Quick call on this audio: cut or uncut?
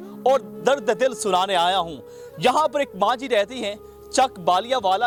uncut